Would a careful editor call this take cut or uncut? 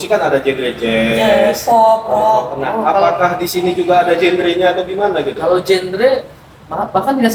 uncut